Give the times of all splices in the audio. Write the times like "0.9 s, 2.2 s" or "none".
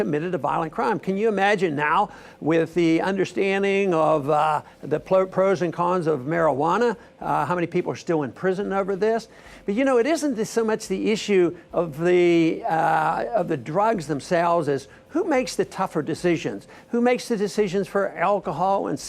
11.4 s